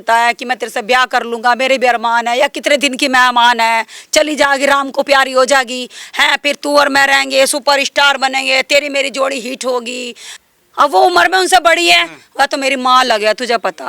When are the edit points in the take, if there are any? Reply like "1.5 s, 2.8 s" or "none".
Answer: 10.3 s